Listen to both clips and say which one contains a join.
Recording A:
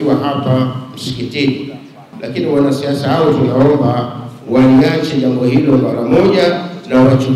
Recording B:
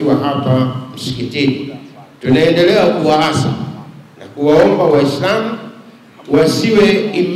A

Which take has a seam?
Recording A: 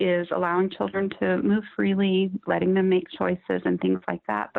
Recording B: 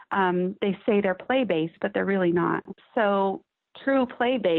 B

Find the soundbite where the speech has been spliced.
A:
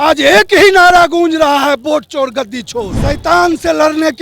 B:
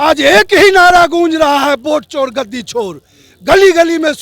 A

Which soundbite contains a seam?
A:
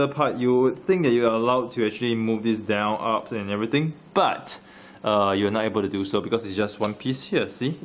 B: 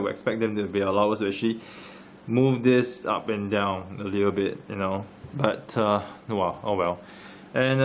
B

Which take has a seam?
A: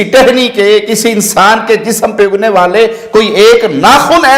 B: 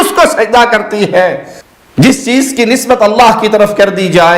B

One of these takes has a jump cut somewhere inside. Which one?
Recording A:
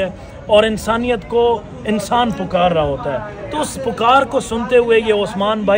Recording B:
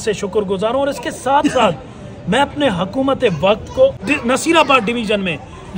B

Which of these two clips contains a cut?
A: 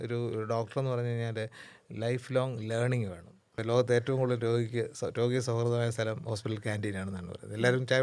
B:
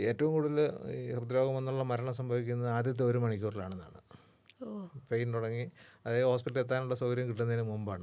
A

